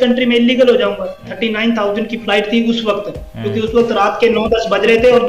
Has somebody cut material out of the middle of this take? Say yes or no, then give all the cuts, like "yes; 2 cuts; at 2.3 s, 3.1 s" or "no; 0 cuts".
yes; 1 cut; at 1.3 s